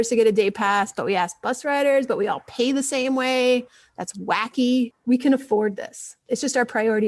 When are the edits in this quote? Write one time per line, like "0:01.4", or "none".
0:05.0
0:06.2

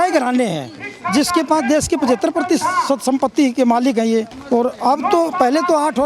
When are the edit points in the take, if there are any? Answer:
0:04.4

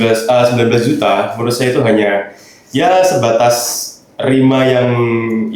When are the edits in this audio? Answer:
none

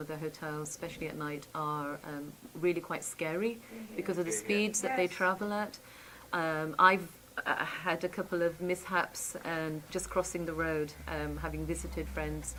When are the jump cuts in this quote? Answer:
none

